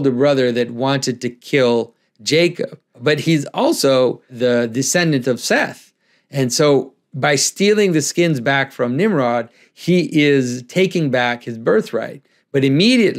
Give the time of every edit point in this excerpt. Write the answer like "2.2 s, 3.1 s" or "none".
2.9 s, 4.3 s